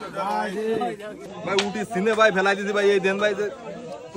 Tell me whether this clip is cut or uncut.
cut